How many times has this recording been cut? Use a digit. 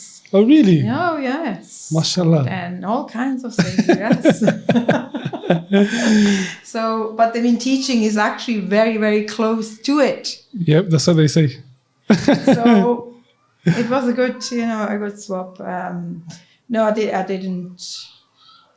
0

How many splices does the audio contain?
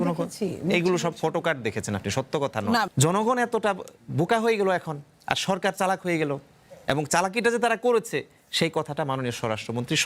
1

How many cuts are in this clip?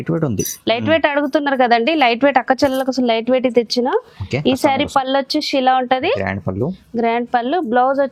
0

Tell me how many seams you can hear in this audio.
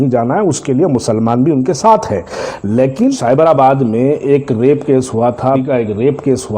2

